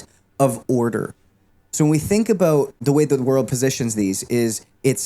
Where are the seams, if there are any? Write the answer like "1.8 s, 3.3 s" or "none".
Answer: 2.8 s, 3.5 s

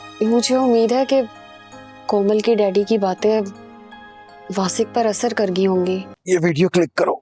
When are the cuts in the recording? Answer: 6.1 s

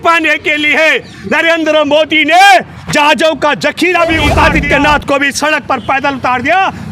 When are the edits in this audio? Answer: 4.3 s

